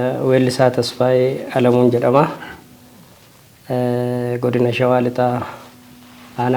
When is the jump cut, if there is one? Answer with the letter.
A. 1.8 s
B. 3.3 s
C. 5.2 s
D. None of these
D